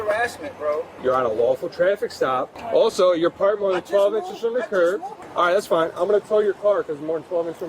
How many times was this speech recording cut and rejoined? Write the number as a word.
three